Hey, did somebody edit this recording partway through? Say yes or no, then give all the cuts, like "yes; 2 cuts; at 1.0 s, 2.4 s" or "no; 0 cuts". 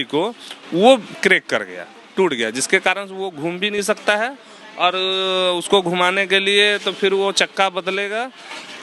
no; 0 cuts